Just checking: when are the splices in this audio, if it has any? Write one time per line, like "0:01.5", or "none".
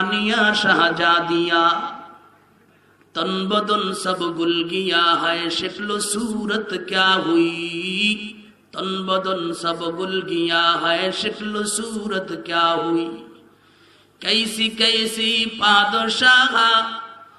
none